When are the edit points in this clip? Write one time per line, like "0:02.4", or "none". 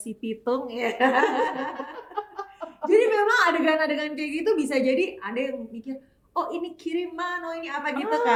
none